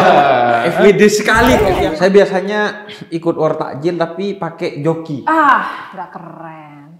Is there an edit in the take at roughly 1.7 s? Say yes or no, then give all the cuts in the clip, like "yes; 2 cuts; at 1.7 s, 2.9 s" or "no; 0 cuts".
yes; 1 cut; at 1.7 s